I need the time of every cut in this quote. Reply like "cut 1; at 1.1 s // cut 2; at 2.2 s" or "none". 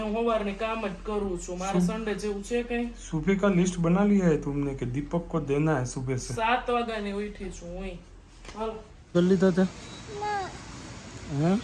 none